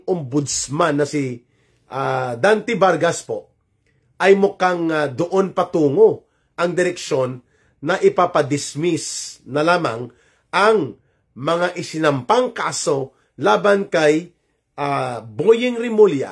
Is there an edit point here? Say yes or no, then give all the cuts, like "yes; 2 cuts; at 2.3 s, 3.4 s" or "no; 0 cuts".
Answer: no; 0 cuts